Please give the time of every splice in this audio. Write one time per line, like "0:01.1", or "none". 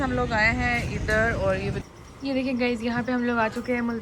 0:01.9